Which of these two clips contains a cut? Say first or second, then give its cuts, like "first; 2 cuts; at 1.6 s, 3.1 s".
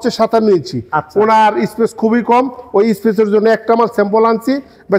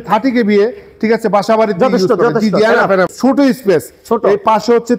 second; 1 cut; at 3.1 s